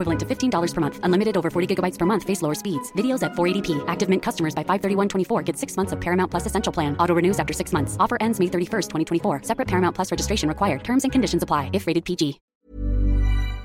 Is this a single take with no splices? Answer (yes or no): no